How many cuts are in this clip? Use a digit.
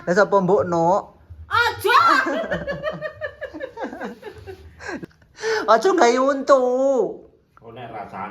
1